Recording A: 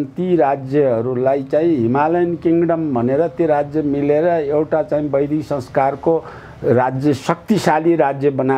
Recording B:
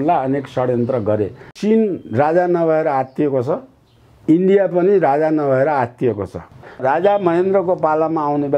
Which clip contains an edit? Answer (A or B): B